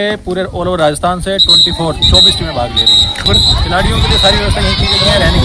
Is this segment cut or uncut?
uncut